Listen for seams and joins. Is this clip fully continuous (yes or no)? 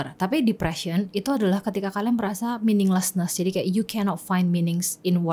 yes